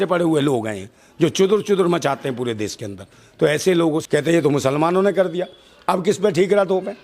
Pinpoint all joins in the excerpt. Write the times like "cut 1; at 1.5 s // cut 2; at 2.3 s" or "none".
cut 1; at 4.0 s